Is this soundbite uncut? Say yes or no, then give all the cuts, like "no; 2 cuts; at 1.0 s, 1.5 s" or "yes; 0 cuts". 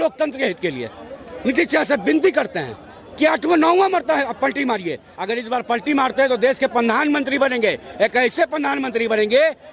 no; 1 cut; at 5.1 s